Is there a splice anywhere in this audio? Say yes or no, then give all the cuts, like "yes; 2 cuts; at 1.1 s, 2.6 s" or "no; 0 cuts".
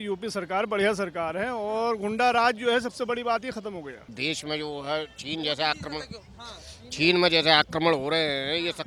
yes; 1 cut; at 4.1 s